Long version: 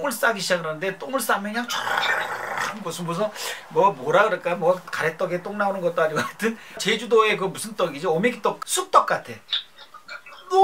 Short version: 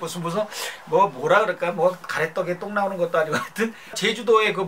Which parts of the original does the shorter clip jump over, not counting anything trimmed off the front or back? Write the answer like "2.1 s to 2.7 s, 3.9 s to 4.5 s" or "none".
none